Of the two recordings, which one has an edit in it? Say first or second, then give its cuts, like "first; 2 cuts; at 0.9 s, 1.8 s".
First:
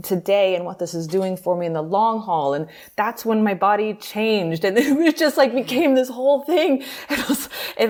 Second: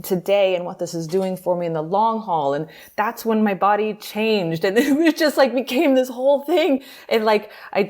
second; 1 cut; at 6.9 s